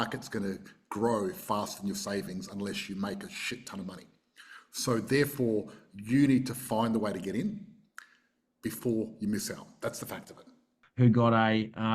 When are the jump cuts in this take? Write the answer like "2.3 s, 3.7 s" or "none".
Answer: 10.8 s